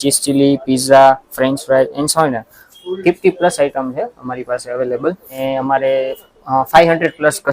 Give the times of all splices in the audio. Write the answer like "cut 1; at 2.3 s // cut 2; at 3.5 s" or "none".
cut 1; at 5.4 s

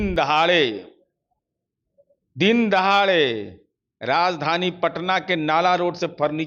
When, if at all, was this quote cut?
none

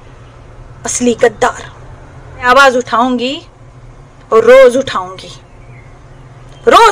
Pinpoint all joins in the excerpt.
cut 1; at 2.5 s

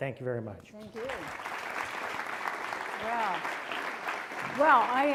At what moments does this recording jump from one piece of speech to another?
none

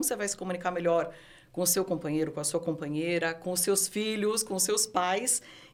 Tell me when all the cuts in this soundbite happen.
none

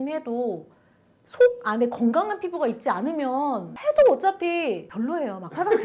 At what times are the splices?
cut 1; at 3.7 s // cut 2; at 4.9 s

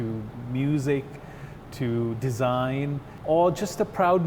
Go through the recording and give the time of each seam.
cut 1; at 3.1 s

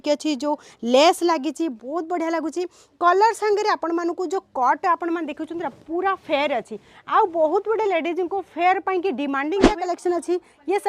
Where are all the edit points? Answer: cut 1; at 9.9 s

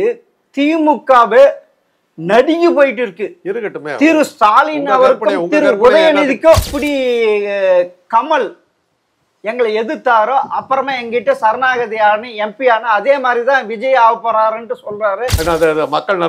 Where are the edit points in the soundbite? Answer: cut 1; at 6.8 s // cut 2; at 15.3 s

